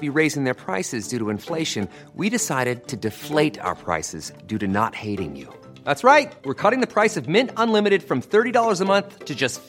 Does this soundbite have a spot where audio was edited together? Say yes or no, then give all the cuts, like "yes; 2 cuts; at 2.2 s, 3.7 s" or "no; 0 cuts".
no; 0 cuts